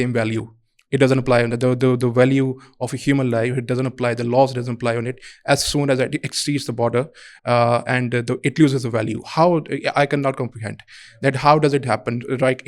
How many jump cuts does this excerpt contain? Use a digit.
0